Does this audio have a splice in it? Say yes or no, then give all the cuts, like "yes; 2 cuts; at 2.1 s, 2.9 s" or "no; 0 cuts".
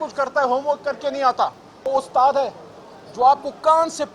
yes; 1 cut; at 1.8 s